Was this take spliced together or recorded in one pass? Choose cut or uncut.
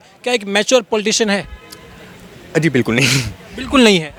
uncut